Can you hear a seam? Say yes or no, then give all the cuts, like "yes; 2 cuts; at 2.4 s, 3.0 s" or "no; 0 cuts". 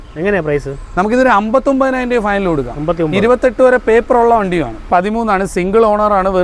yes; 1 cut; at 4.8 s